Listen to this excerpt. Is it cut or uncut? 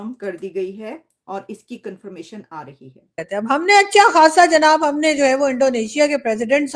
cut